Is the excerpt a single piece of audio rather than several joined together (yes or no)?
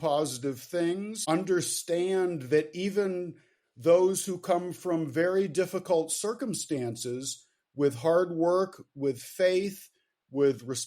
no